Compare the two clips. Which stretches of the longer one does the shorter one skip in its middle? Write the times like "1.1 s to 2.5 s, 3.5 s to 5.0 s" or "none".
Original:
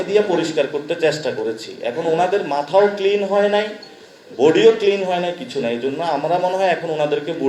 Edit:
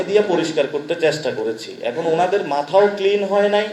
none